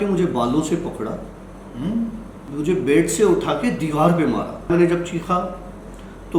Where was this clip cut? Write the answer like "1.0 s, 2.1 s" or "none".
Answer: 2.4 s, 4.7 s